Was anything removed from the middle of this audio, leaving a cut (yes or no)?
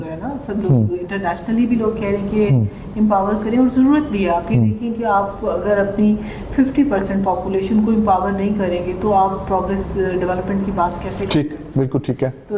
no